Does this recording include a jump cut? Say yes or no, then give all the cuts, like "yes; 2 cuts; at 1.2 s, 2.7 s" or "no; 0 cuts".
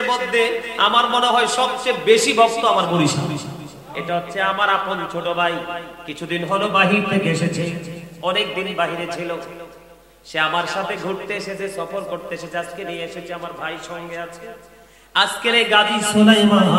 yes; 1 cut; at 4.0 s